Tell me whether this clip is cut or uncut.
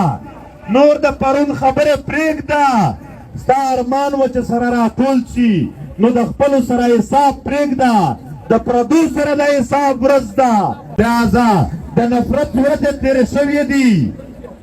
cut